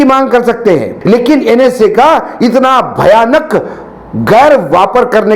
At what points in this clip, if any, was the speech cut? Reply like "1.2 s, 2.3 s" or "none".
0.9 s